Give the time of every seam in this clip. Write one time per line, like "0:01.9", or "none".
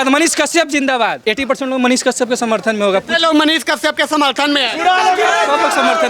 0:01.2